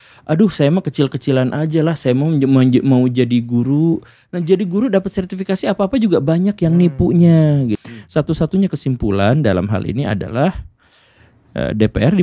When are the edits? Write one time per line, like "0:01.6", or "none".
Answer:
0:07.8